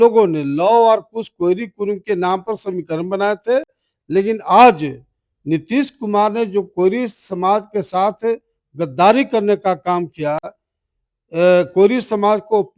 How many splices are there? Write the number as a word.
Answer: zero